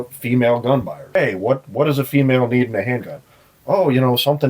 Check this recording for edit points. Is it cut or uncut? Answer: cut